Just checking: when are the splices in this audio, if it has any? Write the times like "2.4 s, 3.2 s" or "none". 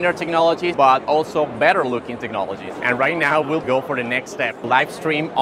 0.7 s, 2.7 s

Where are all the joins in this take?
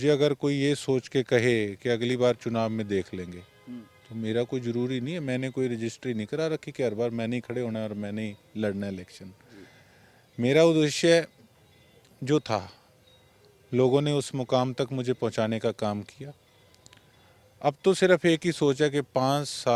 none

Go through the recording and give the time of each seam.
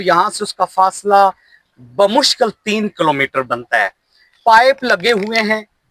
none

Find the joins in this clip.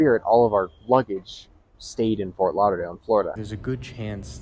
3.5 s

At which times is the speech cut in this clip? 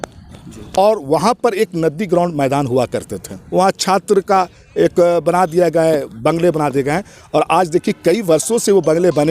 3.3 s

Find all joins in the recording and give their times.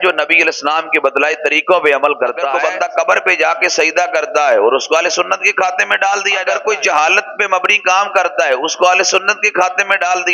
2.5 s, 6.4 s

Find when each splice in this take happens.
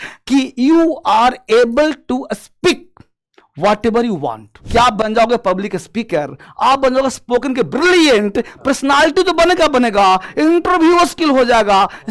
4.6 s

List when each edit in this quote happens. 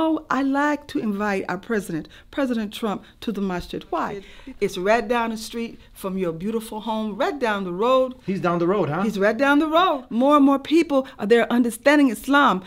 4.3 s, 10.0 s

